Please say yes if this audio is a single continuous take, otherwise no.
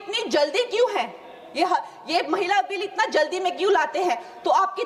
yes